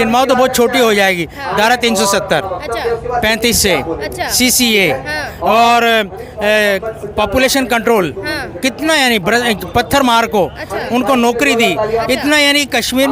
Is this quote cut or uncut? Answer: uncut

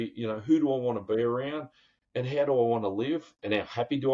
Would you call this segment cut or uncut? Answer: uncut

